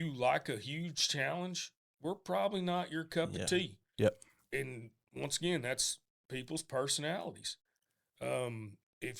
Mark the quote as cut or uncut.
uncut